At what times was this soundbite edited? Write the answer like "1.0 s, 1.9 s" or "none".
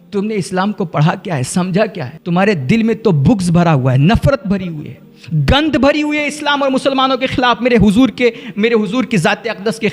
2.1 s